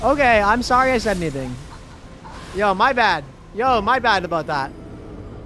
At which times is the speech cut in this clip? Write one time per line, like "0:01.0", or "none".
none